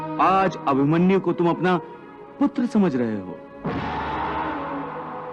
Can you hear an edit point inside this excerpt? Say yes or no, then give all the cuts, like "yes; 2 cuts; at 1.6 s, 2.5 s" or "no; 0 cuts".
no; 0 cuts